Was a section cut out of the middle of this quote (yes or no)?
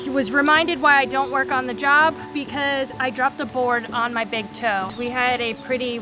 yes